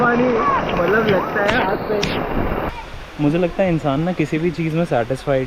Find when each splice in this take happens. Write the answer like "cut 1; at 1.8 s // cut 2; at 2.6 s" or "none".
cut 1; at 2.7 s